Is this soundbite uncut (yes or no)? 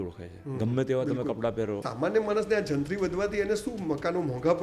no